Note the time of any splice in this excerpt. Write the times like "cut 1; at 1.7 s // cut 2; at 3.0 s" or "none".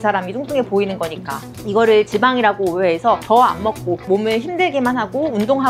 none